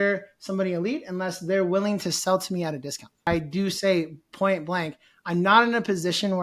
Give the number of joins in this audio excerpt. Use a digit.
1